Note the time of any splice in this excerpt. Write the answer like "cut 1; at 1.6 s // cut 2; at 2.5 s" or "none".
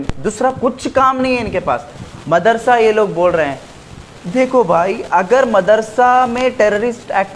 none